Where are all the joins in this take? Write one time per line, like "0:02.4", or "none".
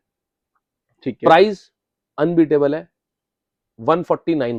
none